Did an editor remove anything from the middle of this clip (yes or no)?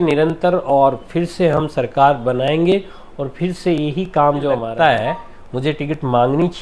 yes